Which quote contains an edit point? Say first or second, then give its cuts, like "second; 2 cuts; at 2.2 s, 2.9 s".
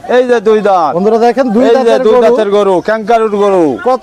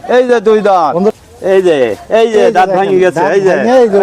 second; 1 cut; at 1.1 s